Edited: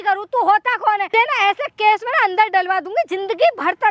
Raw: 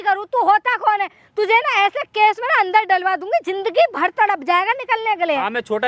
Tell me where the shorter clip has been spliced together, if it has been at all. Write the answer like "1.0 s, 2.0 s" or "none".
1.1 s